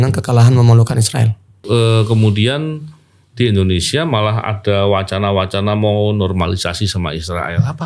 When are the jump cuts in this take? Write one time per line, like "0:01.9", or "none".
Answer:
0:01.6